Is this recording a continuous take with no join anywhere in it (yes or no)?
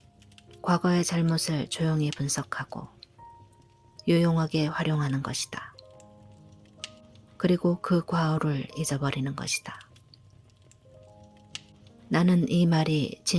yes